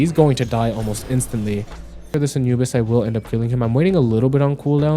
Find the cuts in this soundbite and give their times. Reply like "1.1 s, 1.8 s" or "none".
2.0 s